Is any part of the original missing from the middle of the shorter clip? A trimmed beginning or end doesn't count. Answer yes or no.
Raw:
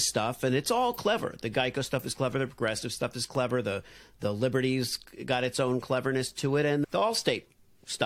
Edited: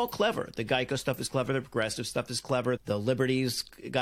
yes